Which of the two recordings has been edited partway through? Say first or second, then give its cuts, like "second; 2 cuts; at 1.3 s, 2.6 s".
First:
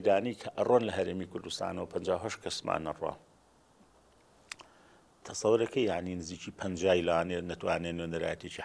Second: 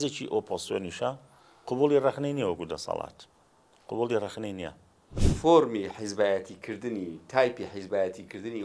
second; 1 cut; at 5.2 s